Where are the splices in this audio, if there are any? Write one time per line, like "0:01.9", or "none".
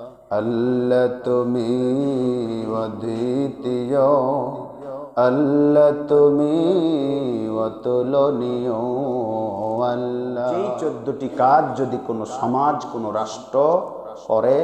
0:10.8